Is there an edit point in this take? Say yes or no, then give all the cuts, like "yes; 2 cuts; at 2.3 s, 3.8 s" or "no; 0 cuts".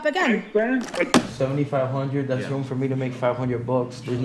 yes; 1 cut; at 1.3 s